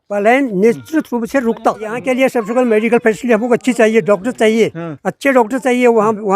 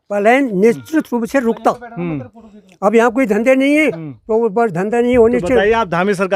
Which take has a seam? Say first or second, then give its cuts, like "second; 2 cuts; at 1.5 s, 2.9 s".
first; 1 cut; at 2.0 s